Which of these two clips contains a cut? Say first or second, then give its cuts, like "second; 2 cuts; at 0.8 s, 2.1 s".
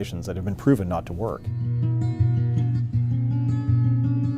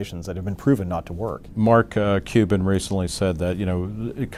first; 1 cut; at 1.2 s